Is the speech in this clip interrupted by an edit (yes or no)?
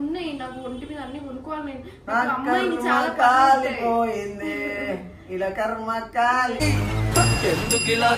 no